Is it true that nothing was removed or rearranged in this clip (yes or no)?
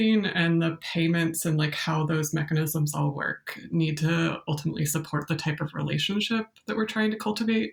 yes